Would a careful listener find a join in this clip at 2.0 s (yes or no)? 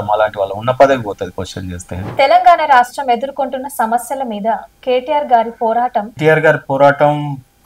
yes